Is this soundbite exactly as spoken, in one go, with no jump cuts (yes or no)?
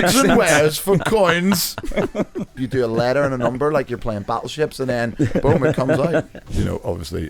no